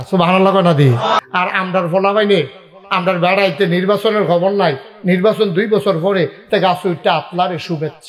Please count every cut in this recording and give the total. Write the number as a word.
one